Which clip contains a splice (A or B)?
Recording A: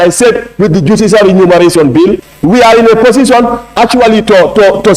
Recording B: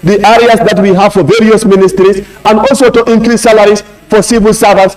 A